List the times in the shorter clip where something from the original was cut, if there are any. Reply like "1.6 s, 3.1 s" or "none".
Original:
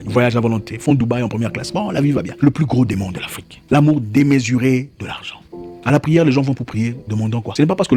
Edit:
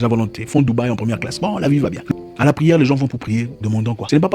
2.0 s